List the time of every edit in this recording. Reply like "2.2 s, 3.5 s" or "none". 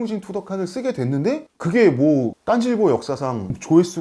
none